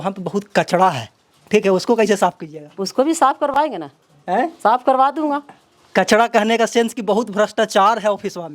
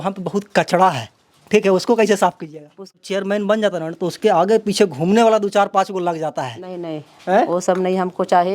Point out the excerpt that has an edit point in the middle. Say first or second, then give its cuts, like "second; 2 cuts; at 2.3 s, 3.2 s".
second; 1 cut; at 3.0 s